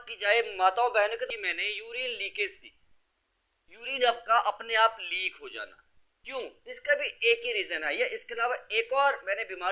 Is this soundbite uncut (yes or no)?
no